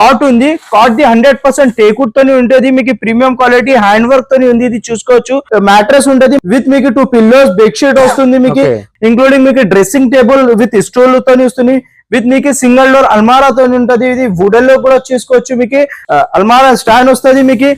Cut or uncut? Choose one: cut